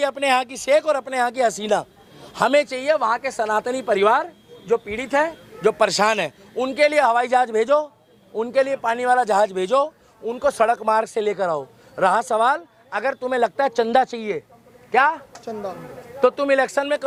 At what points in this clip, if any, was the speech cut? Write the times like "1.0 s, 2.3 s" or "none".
none